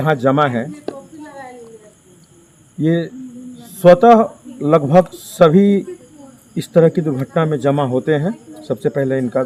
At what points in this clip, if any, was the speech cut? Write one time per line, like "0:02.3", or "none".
none